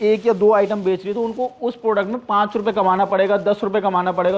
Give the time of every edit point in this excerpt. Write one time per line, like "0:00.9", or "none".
none